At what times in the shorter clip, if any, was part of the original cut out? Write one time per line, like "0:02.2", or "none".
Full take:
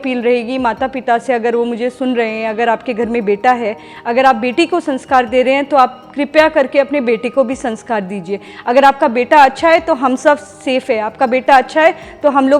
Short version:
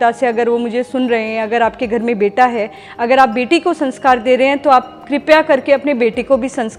none